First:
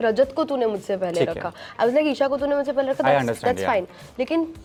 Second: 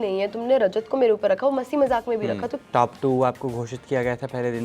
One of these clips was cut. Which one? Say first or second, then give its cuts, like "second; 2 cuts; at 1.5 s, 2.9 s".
second; 1 cut; at 2.5 s